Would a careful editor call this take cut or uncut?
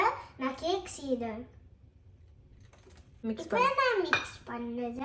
cut